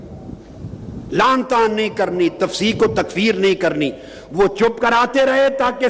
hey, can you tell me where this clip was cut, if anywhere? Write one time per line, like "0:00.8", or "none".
none